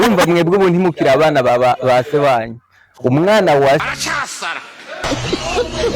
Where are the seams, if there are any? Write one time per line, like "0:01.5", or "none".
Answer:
0:03.9

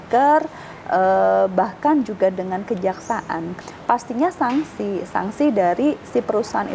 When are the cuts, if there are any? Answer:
0:03.5

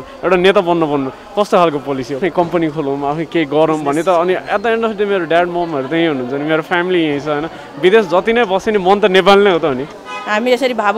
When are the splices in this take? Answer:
0:02.2
0:09.9

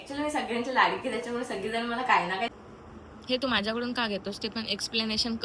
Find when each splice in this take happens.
0:02.5

